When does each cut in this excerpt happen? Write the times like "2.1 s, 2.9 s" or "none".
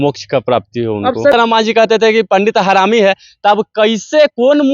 1.3 s

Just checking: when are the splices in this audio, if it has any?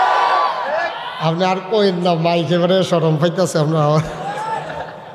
none

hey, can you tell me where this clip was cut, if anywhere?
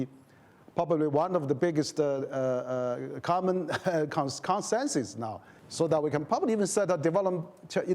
none

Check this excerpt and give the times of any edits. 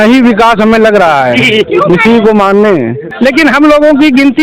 3.0 s

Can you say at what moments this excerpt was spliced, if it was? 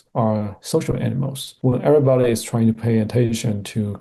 none

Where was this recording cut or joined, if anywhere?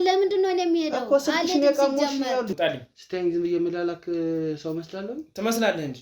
2.5 s

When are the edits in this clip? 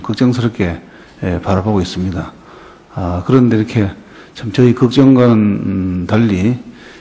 4.5 s

